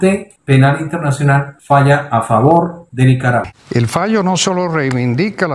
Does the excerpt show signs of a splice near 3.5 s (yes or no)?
yes